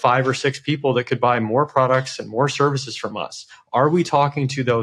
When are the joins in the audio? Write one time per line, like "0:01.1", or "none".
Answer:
none